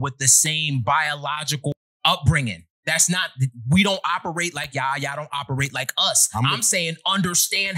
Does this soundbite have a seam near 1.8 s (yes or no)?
yes